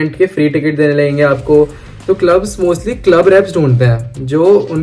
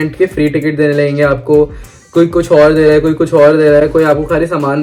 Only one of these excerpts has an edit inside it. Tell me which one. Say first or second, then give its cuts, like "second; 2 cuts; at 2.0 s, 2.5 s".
first; 1 cut; at 1.9 s